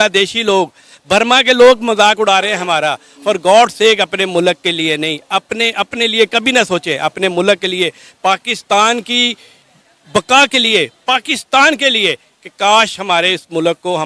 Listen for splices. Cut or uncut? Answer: uncut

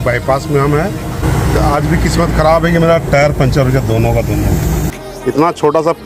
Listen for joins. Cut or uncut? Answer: cut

